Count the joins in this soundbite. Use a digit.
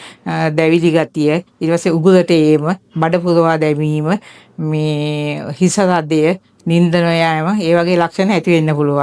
0